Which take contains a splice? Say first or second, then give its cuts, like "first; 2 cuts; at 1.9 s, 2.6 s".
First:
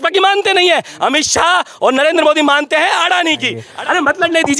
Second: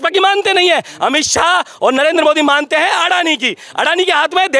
first; 1 cut; at 3.7 s